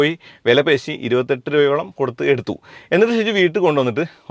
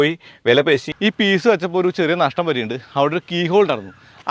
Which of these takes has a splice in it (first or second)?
second